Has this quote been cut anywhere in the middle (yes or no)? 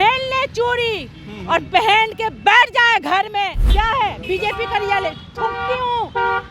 yes